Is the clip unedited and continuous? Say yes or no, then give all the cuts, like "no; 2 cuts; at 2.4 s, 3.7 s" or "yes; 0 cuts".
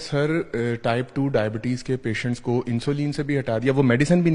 yes; 0 cuts